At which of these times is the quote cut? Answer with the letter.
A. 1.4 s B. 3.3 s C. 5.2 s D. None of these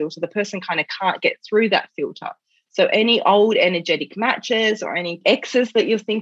C